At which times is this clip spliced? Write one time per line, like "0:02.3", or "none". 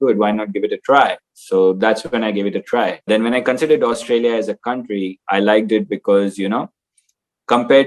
0:03.0